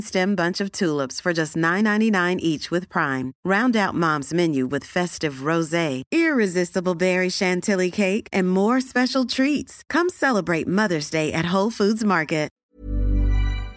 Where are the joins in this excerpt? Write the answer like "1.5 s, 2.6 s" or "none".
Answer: 12.6 s